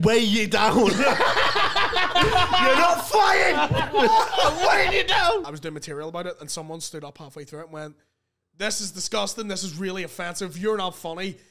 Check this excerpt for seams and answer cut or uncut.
cut